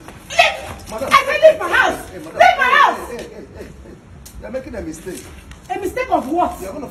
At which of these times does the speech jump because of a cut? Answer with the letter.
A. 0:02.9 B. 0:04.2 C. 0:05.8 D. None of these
D